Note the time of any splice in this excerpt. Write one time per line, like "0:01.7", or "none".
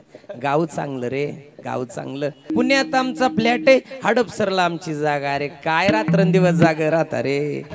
0:02.5